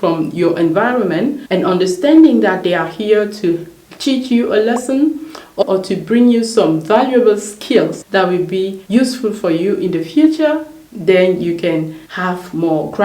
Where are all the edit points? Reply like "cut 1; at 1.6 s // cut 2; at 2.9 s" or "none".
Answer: cut 1; at 1.4 s // cut 2; at 5.6 s